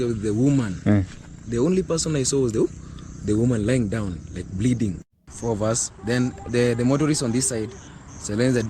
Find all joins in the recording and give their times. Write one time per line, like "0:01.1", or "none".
0:05.0

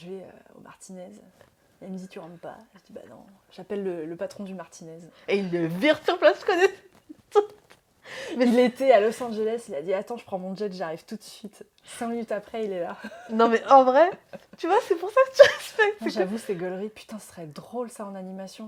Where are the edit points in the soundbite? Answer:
none

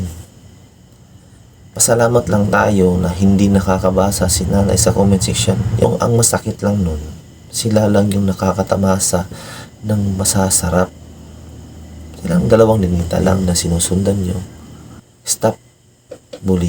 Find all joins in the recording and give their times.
0:05.8
0:13.3

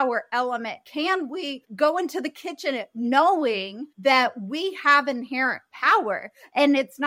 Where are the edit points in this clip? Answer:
0:01.7

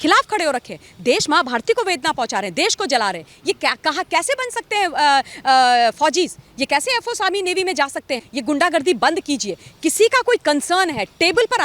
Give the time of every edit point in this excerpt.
0:08.3

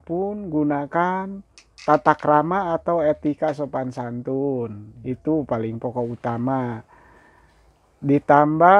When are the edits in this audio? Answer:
none

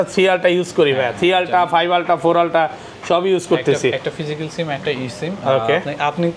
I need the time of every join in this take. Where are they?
none

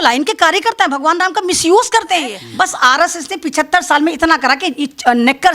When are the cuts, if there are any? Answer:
0:02.4

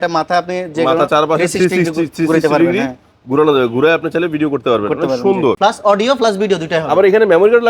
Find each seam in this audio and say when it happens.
0:05.6

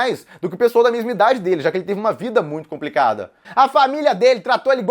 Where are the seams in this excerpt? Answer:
0:03.5

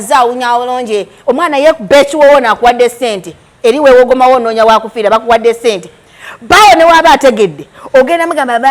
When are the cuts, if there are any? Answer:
none

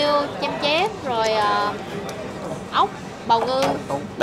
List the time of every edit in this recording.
none

